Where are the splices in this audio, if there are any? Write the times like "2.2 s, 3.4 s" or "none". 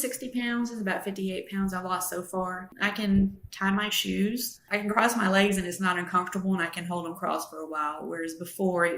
none